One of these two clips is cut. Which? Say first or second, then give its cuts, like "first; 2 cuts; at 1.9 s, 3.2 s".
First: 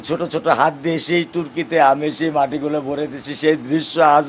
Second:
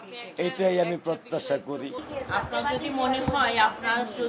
second; 1 cut; at 2.0 s